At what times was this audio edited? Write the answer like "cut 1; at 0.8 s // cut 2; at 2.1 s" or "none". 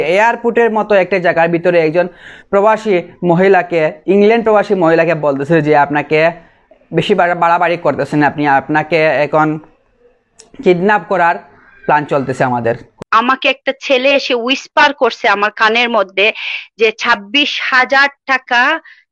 cut 1; at 12.9 s